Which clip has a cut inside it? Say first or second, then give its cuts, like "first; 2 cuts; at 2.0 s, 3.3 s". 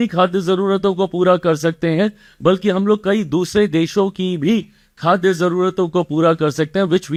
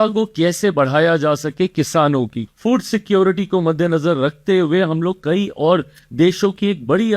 second; 1 cut; at 2.5 s